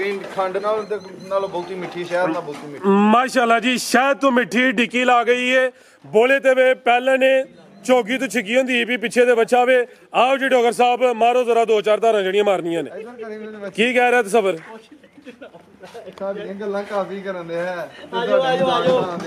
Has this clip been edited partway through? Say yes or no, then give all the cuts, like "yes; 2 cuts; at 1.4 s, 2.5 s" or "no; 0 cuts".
no; 0 cuts